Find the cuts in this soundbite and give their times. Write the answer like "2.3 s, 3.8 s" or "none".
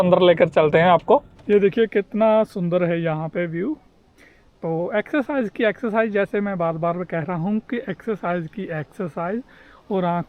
1.3 s